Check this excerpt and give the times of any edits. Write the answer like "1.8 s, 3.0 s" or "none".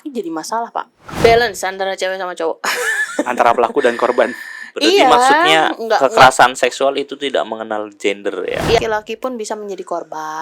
1.0 s, 8.8 s